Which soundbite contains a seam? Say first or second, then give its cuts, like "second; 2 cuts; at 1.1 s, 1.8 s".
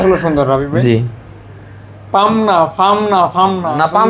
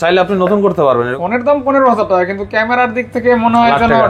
second; 1 cut; at 1.2 s